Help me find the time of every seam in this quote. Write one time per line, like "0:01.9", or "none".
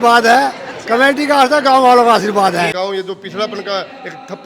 0:02.7